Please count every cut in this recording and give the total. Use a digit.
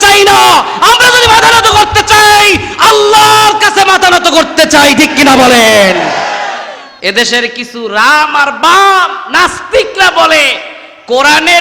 1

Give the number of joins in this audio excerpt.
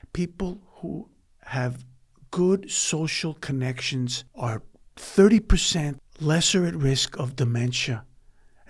2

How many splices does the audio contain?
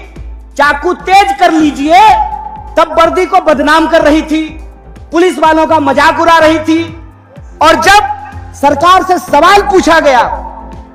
0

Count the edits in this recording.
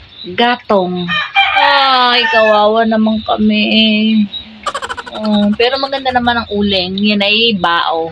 0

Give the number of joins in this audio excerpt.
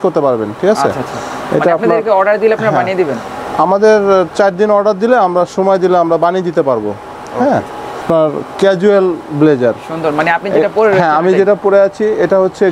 0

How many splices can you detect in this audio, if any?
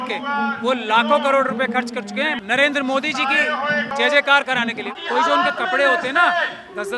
3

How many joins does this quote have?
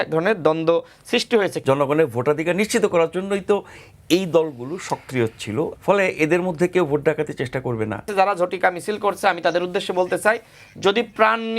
3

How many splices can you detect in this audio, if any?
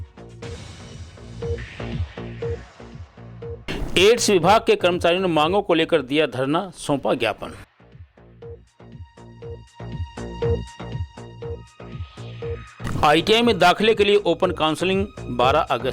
1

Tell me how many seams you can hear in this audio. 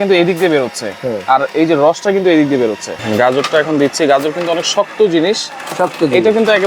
1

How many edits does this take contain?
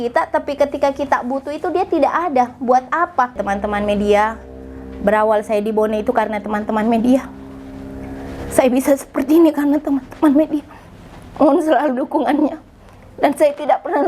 1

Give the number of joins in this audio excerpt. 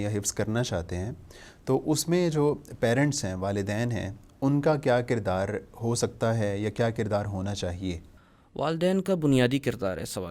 0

